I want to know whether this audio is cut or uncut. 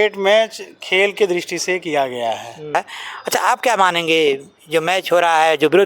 cut